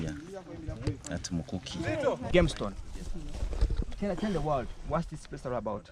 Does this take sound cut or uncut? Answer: cut